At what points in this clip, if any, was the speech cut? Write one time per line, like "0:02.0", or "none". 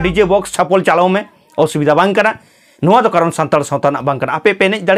none